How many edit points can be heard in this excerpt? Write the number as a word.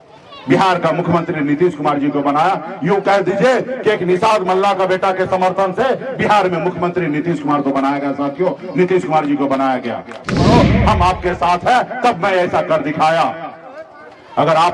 one